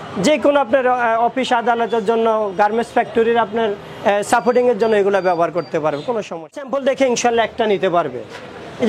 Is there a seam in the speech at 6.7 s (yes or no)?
yes